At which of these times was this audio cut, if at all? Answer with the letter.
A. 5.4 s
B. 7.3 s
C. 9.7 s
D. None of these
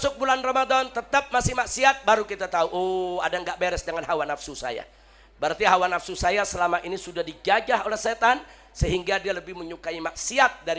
D